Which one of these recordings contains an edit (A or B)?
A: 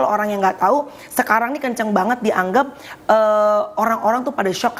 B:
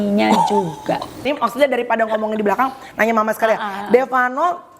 B